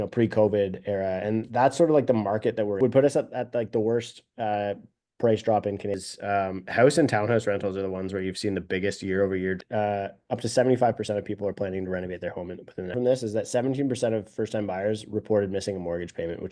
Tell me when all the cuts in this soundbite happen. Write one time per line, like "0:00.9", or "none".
0:02.8
0:06.0
0:09.6
0:12.9